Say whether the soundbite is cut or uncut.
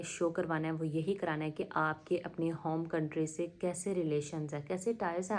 uncut